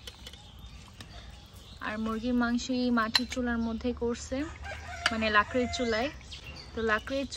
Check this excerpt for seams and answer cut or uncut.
uncut